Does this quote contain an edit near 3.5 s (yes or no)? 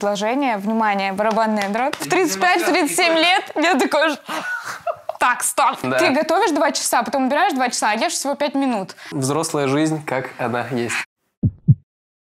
no